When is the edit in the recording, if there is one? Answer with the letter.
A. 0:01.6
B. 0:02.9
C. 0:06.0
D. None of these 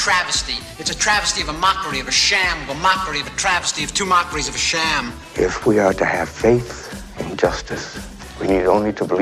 D